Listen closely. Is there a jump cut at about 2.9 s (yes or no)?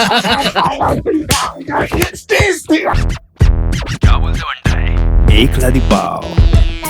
yes